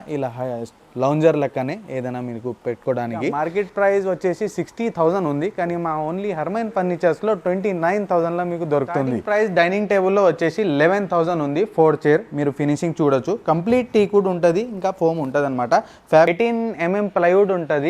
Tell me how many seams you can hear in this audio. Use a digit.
3